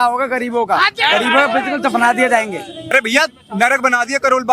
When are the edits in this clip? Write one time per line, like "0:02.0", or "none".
0:02.9